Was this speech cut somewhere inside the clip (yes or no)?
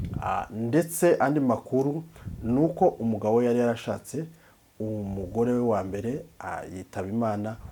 no